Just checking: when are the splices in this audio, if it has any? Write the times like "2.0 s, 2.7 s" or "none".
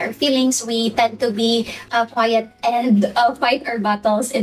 none